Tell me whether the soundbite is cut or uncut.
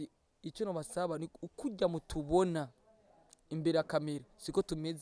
uncut